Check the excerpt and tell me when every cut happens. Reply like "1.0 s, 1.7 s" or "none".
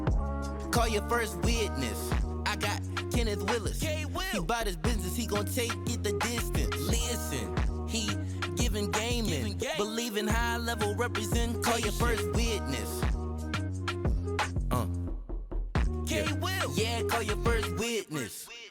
none